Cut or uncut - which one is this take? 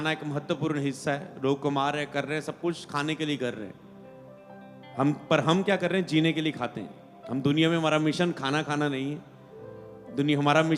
uncut